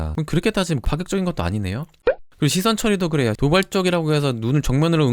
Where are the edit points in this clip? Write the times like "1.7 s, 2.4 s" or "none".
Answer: 2.0 s, 3.4 s